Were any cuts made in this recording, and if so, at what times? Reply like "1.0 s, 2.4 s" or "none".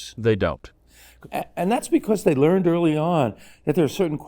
1.1 s

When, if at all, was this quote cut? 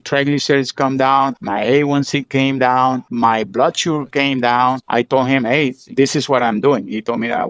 1.4 s, 3.1 s, 4.8 s

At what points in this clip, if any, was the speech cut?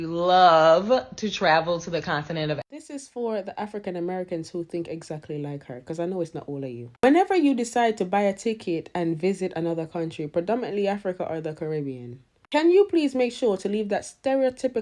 2.6 s

